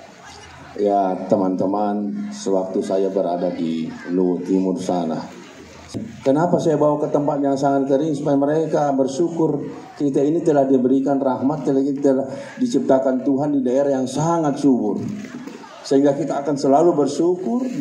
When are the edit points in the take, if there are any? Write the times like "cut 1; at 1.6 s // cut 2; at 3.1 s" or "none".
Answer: cut 1; at 5.9 s